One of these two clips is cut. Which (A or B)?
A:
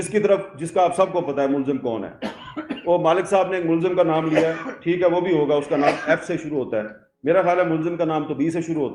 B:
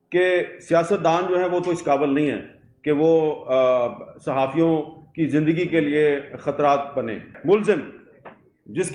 B